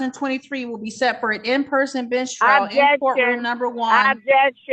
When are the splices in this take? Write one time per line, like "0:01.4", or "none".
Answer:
none